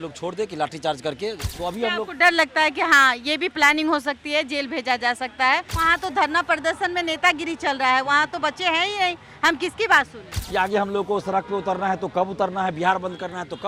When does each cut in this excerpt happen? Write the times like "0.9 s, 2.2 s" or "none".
1.5 s, 5.7 s, 10.3 s